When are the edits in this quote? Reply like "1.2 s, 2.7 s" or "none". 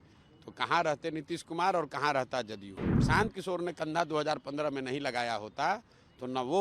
3.0 s